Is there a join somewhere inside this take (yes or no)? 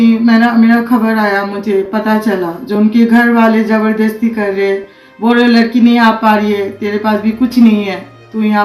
no